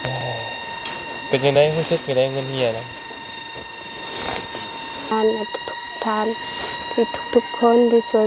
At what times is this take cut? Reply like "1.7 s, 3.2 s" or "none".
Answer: 5.1 s